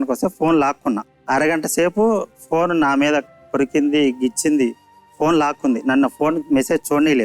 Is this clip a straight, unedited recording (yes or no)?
no